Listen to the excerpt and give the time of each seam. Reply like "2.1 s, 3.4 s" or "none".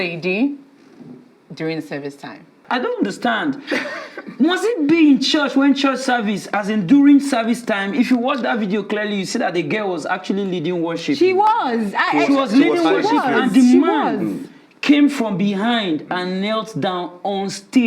2.6 s